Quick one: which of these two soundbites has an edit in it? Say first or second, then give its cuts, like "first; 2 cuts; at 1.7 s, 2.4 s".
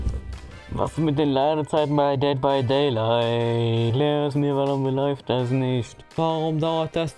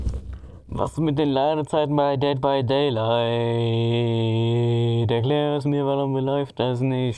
first; 2 cuts; at 3.9 s, 6.0 s